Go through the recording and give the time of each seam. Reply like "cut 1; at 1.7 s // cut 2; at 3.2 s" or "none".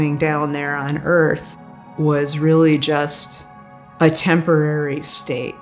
none